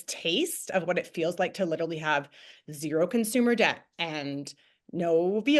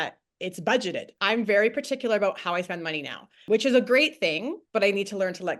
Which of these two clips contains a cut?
second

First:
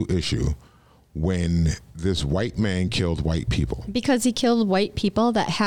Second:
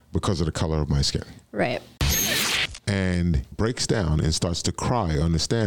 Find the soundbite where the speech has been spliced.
second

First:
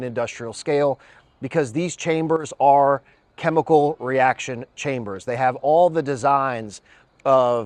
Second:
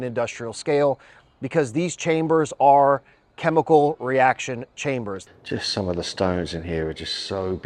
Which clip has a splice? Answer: second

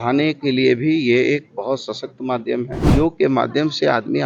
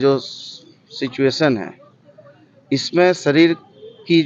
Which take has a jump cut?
first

